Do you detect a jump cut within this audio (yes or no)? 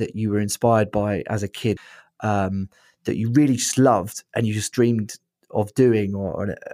yes